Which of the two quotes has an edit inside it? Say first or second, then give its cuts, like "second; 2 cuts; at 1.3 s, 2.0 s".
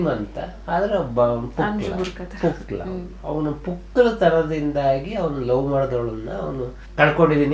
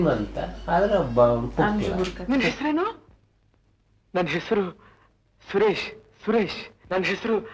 second; 1 cut; at 2.2 s